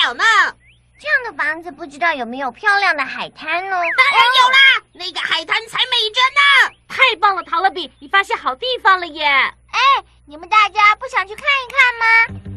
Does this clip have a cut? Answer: no; 0 cuts

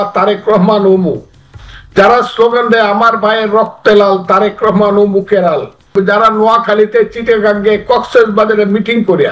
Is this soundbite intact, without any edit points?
no; 1 cut; at 5.9 s

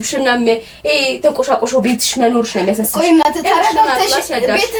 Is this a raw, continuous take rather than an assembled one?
yes; 0 cuts

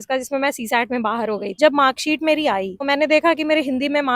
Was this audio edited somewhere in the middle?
yes; 2 cuts; at 1.5 s, 2.9 s

